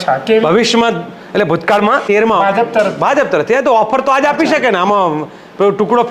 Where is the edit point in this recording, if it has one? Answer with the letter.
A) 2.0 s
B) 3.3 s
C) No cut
A